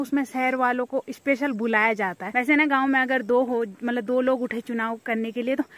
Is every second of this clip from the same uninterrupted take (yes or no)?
no